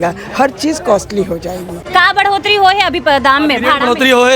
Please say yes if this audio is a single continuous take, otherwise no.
no